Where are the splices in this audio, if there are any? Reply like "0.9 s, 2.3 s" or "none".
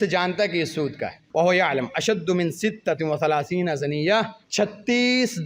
1.2 s, 4.4 s